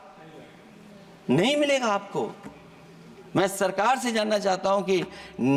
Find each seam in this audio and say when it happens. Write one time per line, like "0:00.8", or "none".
none

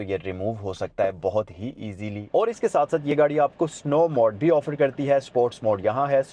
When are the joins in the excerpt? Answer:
0:02.2

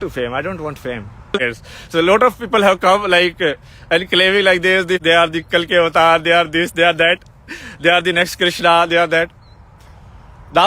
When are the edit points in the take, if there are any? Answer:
0:01.4
0:05.0

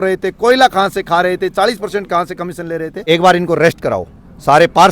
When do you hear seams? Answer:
0:03.0

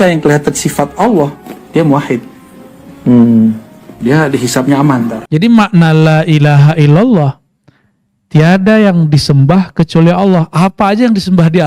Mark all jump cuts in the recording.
0:05.2

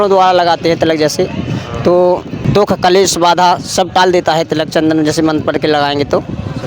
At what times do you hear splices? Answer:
0:02.4

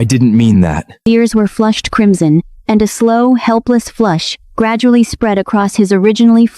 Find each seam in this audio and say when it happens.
0:01.0

